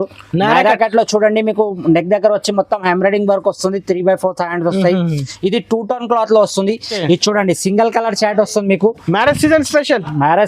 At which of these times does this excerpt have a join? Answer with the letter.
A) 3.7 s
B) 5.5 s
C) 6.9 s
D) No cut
C